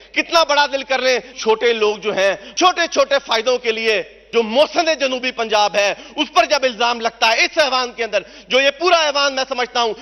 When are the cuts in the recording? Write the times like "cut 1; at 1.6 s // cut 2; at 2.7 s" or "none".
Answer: cut 1; at 1.3 s // cut 2; at 2.5 s // cut 3; at 4.2 s